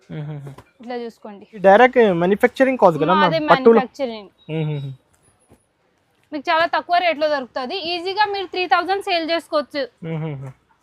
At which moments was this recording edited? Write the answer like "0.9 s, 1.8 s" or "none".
1.6 s